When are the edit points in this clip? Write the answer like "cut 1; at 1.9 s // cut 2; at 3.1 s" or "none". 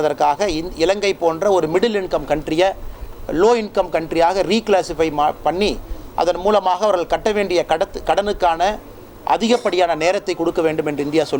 none